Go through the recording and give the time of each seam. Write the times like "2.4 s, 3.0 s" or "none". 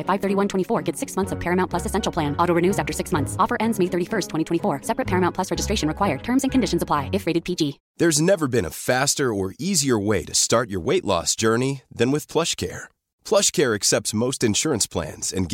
7.8 s